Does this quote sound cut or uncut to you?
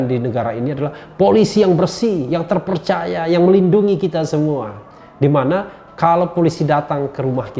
uncut